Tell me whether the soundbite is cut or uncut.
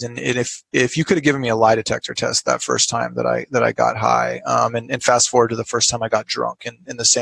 uncut